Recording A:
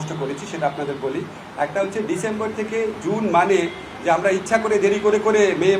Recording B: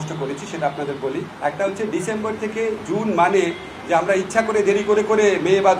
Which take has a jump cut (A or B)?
B